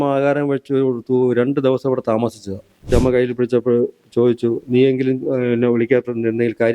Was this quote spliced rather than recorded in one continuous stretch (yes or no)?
yes